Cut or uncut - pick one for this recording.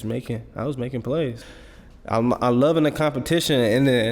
cut